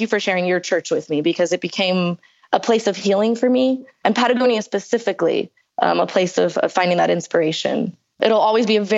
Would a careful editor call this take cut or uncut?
cut